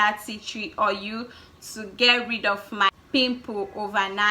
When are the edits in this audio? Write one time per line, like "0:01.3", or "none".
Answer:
0:02.9